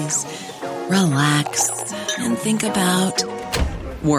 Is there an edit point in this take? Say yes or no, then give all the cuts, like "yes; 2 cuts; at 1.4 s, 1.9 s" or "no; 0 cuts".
no; 0 cuts